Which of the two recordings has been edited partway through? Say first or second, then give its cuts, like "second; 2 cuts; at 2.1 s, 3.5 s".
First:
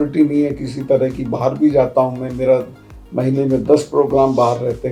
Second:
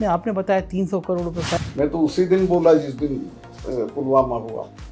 second; 1 cut; at 1.5 s